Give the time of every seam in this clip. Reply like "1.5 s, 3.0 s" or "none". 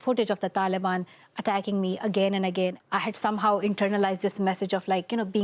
2.8 s